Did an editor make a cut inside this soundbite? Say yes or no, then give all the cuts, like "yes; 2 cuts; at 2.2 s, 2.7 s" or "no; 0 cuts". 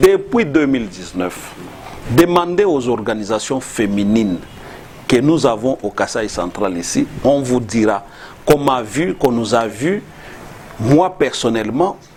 no; 0 cuts